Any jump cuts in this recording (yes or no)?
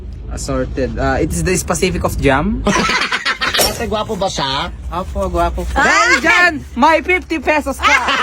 yes